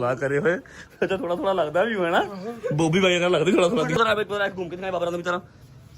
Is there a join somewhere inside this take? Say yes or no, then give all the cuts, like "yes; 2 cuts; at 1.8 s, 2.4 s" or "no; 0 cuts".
yes; 1 cut; at 4.0 s